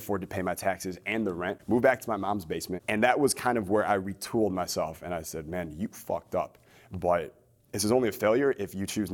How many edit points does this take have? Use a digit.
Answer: 2